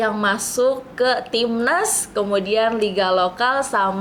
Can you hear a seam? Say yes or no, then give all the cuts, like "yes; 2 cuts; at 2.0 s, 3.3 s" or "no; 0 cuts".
no; 0 cuts